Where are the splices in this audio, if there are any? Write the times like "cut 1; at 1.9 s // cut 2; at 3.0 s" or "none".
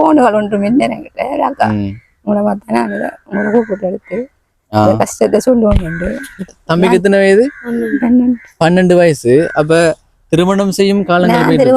cut 1; at 6.5 s